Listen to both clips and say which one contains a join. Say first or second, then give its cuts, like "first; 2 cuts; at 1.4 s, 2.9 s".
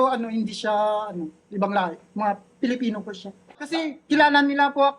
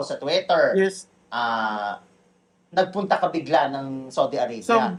first; 1 cut; at 3.7 s